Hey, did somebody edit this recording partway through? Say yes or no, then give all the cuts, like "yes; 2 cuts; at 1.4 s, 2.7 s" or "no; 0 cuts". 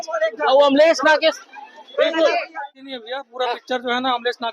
yes; 1 cut; at 2.5 s